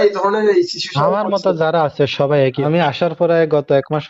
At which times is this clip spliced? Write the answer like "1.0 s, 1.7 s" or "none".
2.6 s